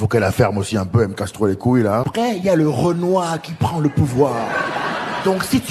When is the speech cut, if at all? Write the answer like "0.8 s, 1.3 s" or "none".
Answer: 2.1 s